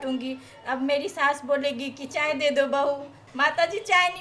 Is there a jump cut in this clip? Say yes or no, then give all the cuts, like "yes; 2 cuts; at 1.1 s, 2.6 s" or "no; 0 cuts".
yes; 1 cut; at 3.2 s